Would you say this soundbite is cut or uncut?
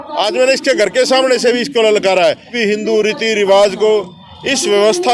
cut